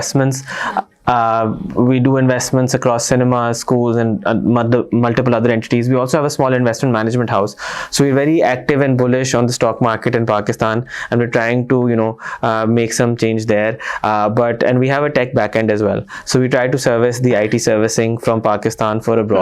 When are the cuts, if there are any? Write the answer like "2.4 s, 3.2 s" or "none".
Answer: none